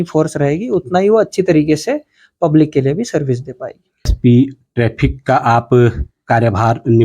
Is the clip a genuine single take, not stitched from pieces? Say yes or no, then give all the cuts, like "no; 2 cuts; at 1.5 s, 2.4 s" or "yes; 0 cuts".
no; 1 cut; at 4.1 s